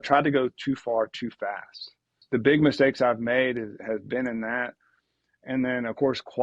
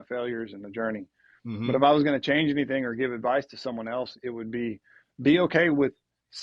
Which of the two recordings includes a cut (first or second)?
first